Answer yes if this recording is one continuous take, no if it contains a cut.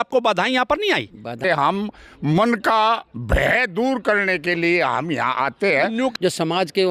no